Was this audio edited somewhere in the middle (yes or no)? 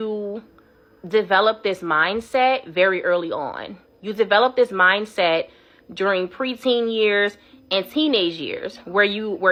no